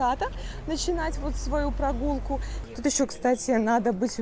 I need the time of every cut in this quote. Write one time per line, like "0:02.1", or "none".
0:02.5